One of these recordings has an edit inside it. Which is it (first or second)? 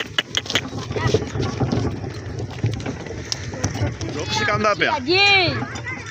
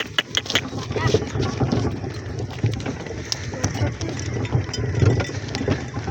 first